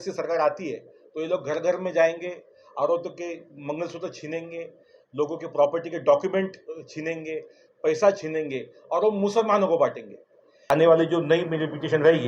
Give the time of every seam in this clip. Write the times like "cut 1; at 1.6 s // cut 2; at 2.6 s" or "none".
cut 1; at 10.6 s